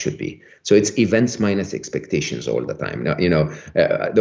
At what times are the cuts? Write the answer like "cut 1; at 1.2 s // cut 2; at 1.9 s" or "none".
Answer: none